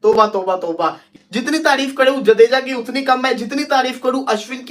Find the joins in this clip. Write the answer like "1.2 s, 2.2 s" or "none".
1.1 s

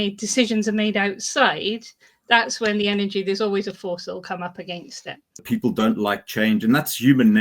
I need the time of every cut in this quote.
5.4 s

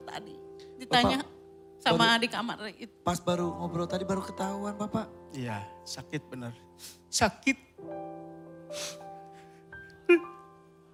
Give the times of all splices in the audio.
none

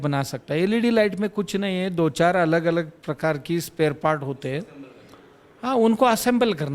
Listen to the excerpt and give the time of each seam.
none

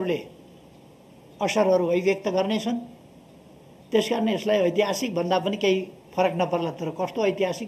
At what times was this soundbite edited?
none

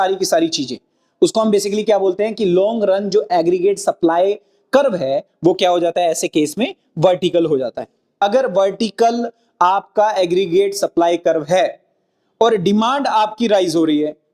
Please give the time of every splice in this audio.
8.1 s

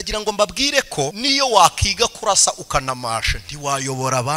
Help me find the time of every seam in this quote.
1.2 s

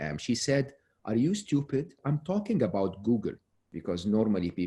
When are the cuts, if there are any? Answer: 2.0 s, 3.7 s

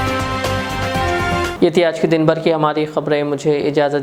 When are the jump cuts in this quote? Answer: none

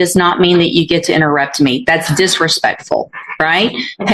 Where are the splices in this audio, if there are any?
none

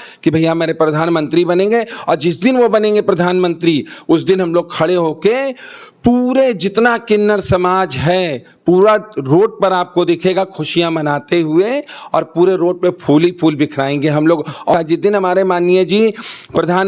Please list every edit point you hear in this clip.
14.7 s

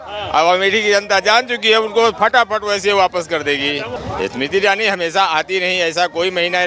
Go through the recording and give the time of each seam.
3.9 s

